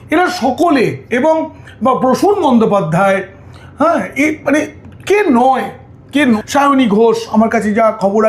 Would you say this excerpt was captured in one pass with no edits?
no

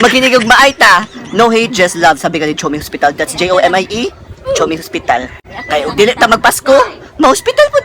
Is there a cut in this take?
no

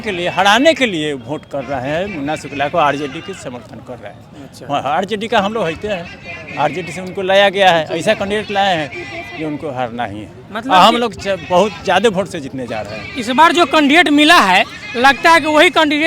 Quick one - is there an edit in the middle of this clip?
no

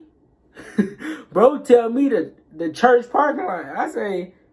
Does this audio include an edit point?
no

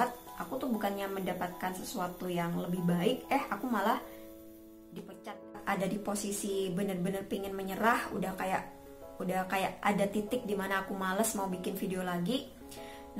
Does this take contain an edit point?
yes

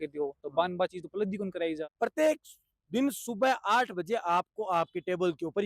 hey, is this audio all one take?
no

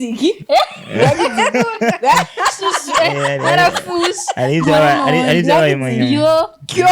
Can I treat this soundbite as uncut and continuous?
yes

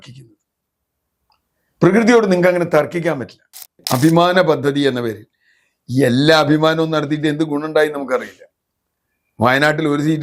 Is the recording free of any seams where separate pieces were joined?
no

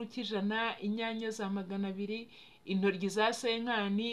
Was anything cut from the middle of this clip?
no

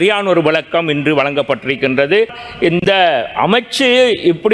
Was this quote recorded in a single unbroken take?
no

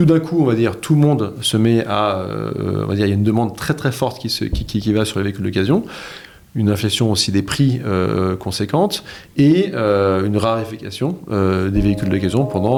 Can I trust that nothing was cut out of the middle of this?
yes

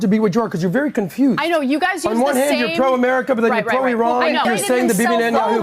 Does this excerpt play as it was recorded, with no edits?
no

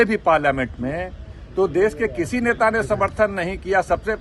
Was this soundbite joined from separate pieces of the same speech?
no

